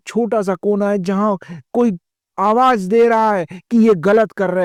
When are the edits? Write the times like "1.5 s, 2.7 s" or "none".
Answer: none